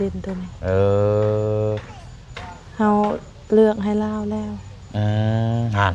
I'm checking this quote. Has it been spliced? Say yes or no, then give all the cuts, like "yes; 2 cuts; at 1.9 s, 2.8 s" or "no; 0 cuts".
no; 0 cuts